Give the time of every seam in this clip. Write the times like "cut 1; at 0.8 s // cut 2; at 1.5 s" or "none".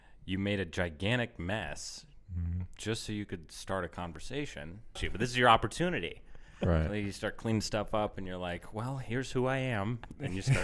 cut 1; at 5.0 s